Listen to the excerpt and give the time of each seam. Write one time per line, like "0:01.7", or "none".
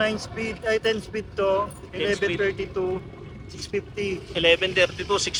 none